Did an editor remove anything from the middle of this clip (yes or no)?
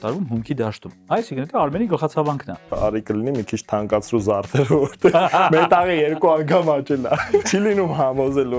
yes